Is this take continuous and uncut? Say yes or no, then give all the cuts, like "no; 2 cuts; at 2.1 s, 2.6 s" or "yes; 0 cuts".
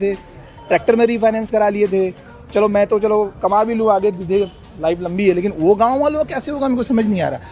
yes; 0 cuts